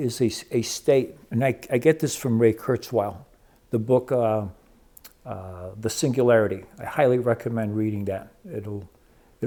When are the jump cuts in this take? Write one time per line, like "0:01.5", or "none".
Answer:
none